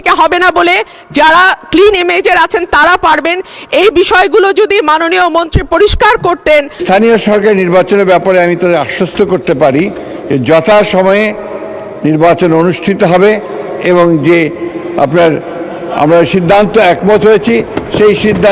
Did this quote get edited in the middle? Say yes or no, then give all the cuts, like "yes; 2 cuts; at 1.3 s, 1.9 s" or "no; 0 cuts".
yes; 1 cut; at 6.8 s